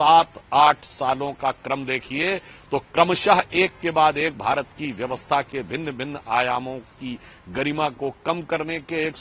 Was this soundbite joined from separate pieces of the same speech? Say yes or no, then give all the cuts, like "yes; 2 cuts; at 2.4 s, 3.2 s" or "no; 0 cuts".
no; 0 cuts